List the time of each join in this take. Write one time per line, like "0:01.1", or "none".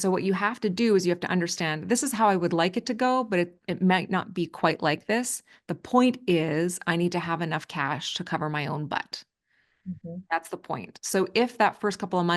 none